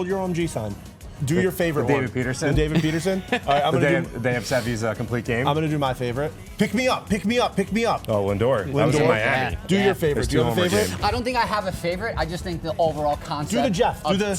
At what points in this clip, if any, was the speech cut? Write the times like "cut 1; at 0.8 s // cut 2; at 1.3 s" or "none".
cut 1; at 1.1 s // cut 2; at 6.4 s